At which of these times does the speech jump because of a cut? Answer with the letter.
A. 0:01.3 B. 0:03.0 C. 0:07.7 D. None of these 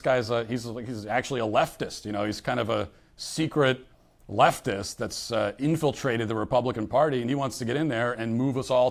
D